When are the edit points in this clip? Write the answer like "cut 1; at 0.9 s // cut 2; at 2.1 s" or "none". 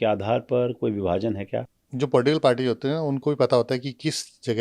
cut 1; at 1.8 s